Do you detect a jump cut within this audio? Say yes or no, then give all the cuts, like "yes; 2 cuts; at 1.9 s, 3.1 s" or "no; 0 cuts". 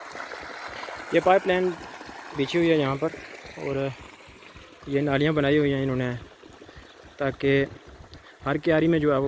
no; 0 cuts